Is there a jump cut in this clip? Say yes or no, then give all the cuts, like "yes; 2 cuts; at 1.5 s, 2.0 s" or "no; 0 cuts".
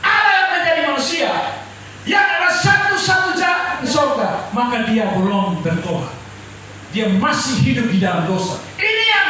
yes; 1 cut; at 3.8 s